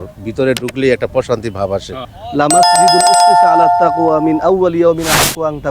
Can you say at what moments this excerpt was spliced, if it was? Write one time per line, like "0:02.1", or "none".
0:02.1
0:04.0